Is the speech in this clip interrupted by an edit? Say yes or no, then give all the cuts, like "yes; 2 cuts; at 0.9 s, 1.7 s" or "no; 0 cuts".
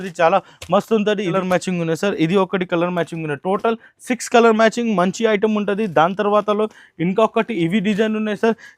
yes; 1 cut; at 1.3 s